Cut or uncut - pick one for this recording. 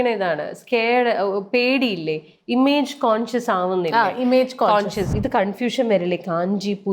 cut